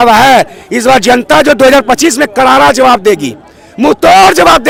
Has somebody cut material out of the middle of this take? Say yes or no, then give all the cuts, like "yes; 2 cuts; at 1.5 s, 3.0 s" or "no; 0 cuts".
no; 0 cuts